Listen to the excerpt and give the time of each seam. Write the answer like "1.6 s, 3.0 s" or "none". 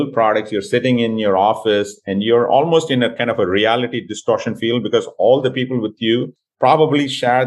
6.4 s